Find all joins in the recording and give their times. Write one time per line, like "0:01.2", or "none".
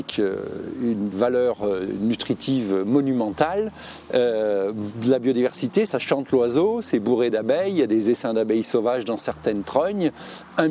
none

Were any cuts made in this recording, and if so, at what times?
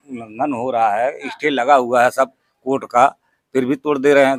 none

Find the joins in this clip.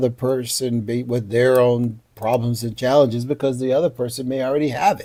none

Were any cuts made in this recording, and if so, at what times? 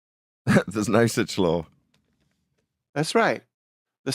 none

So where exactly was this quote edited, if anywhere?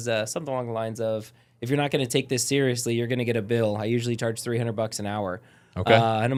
none

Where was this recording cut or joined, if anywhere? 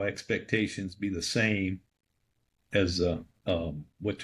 none

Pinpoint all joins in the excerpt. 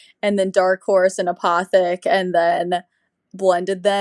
none

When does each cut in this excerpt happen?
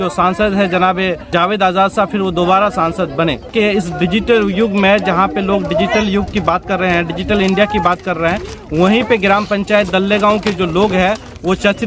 0:01.3
0:03.5

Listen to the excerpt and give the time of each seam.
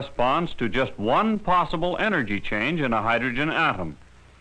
0:02.2

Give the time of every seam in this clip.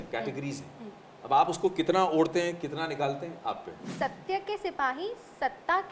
0:03.9

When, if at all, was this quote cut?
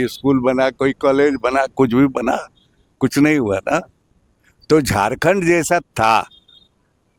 none

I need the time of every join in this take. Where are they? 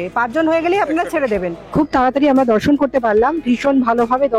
0:01.7

